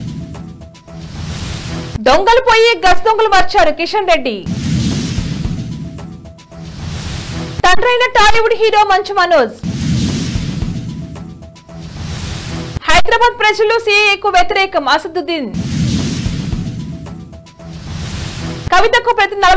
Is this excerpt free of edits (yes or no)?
no